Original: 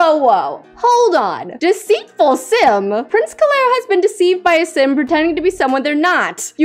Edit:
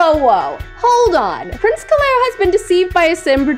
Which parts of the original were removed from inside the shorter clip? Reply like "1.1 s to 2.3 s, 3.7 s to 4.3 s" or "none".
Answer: 1.5 s to 3.0 s

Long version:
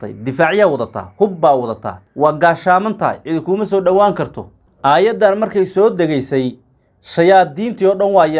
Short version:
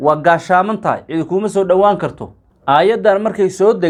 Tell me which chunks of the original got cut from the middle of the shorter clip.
none

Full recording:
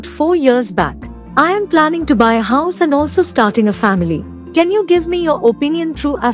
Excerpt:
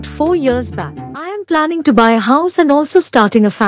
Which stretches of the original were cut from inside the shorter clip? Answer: 1.3 s to 1.5 s

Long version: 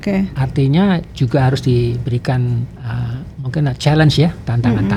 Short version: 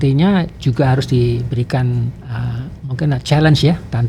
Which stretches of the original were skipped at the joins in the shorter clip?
none

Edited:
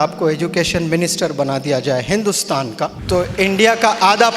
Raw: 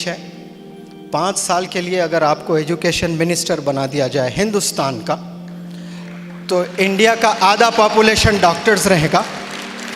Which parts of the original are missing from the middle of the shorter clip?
5.3 s to 6.4 s

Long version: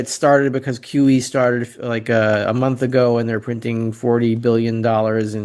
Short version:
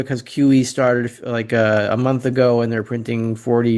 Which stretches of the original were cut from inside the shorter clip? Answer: none

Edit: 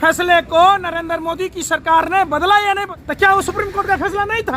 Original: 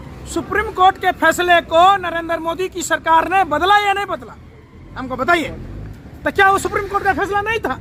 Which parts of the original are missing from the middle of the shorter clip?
4.2 s to 6.1 s

